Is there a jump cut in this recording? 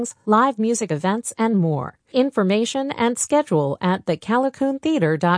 no; 0 cuts

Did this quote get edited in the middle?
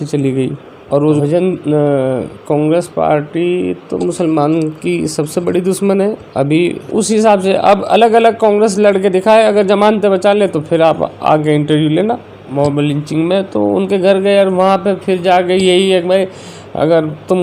yes; 3 cuts; at 1.2 s, 6.8 s, 12.5 s

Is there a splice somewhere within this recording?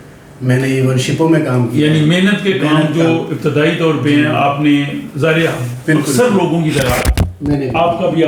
no; 0 cuts

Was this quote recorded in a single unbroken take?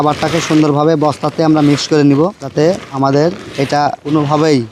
yes; 0 cuts

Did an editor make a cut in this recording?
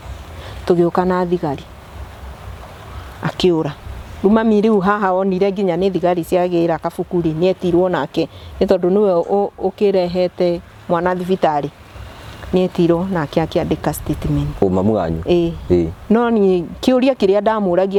no; 0 cuts

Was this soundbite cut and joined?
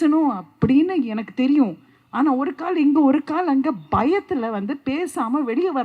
no; 0 cuts

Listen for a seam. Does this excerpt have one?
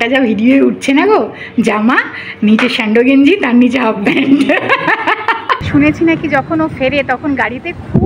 yes; 1 cut; at 5.6 s

